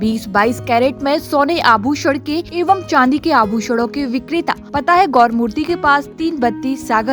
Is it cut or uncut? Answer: cut